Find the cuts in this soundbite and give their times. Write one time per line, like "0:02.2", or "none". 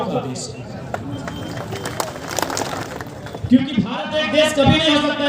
0:02.8